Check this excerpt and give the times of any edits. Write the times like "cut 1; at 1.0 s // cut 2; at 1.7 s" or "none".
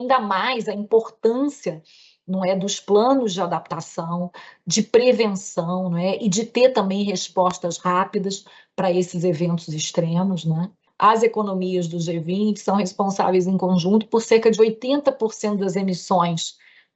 cut 1; at 10.8 s